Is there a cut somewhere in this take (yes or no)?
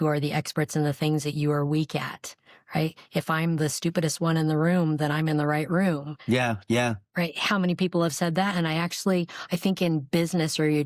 no